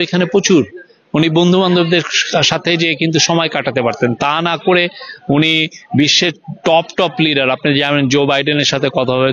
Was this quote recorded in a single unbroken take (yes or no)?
yes